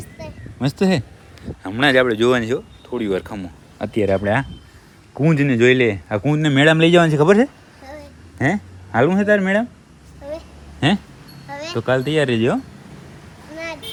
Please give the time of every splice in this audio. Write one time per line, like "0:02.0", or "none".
none

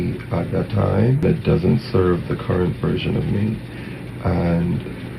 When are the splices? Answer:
0:01.2

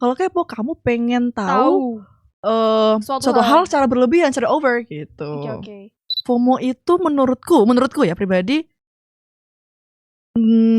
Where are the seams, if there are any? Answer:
0:06.1

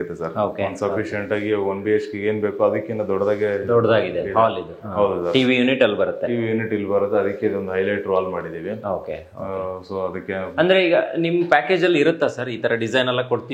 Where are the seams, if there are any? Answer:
none

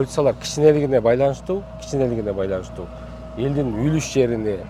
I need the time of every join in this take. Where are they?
none

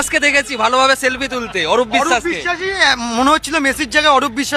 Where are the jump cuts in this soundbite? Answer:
0:02.6

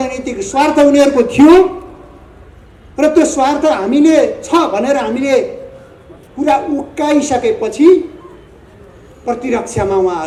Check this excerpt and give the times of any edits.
none

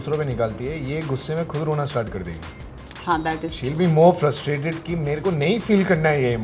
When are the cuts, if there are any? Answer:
none

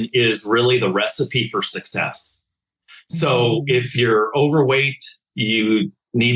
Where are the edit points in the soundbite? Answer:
none

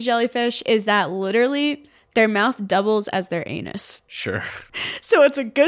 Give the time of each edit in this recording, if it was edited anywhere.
0:04.6

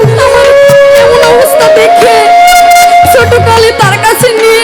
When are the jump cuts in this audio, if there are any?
none

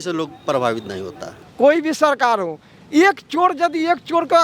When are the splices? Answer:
0:01.3

